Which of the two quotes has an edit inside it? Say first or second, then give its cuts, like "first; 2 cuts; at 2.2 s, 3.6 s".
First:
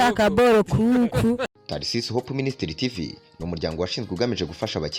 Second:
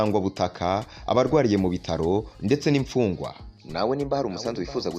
first; 1 cut; at 1.5 s